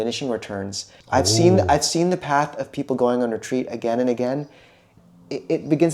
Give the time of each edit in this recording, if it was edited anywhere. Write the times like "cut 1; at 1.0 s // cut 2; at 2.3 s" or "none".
cut 1; at 0.9 s // cut 2; at 4.9 s